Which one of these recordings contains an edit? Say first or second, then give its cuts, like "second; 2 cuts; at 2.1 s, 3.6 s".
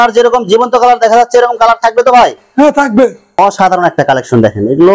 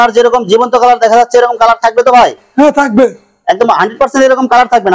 first; 1 cut; at 3.2 s